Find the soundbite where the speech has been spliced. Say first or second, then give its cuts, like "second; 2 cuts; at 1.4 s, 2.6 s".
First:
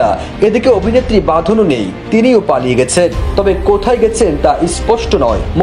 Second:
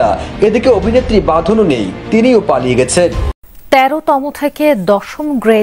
second; 1 cut; at 3.3 s